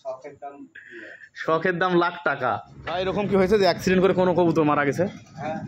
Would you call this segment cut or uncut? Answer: cut